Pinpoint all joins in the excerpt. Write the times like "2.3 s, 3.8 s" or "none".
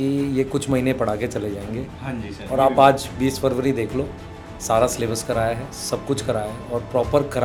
none